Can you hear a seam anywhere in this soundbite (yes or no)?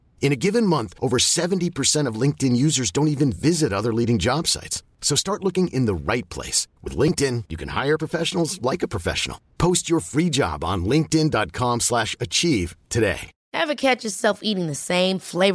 yes